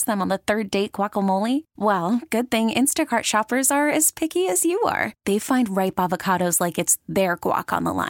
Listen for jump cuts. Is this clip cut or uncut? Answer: uncut